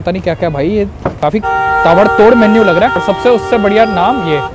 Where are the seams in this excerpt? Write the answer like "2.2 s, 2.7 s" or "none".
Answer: 1.1 s, 3.0 s